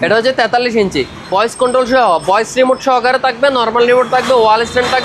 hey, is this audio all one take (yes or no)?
no